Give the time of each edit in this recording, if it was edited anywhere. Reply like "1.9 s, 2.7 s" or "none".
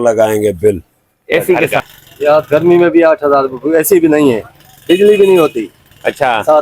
1.7 s